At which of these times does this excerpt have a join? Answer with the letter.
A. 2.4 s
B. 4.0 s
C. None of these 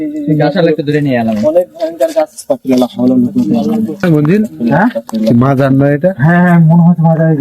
B